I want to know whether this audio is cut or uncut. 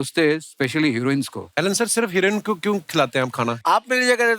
cut